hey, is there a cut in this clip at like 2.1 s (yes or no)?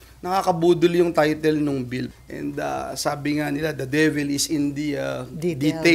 yes